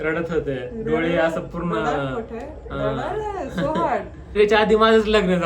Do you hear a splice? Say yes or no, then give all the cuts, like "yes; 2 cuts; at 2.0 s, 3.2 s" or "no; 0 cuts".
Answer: yes; 1 cut; at 4.4 s